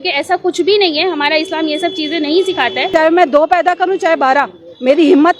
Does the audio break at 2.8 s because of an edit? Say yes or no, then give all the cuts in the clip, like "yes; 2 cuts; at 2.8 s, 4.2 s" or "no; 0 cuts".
yes; 1 cut; at 2.8 s